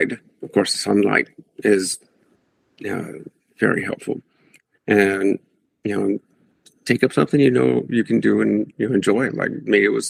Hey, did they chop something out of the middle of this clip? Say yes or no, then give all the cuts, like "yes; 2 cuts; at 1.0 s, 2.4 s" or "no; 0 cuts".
no; 0 cuts